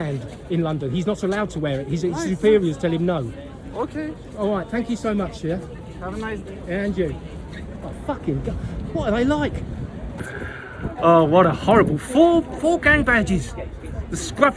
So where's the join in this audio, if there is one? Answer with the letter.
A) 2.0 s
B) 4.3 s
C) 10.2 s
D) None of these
C